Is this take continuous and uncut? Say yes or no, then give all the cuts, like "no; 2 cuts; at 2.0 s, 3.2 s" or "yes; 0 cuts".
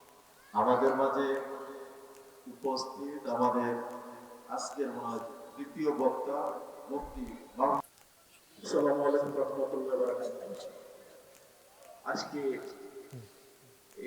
no; 1 cut; at 7.8 s